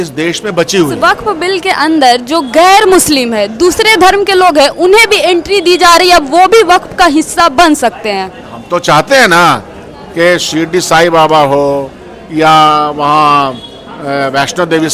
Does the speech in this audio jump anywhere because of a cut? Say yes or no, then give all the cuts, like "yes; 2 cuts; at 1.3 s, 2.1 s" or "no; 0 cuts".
yes; 1 cut; at 0.9 s